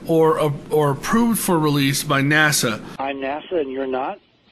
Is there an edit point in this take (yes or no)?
yes